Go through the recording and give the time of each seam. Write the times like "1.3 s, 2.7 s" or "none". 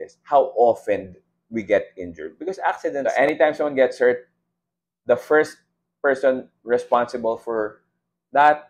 2.8 s